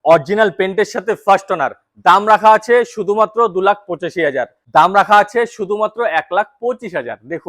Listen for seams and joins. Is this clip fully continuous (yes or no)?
no